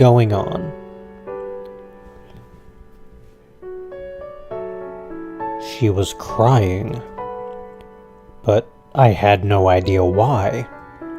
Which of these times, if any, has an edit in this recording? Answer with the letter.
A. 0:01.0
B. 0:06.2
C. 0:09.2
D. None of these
C